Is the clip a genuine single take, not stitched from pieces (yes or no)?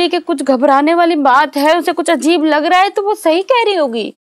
yes